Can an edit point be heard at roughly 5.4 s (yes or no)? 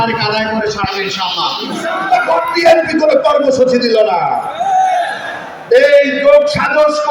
no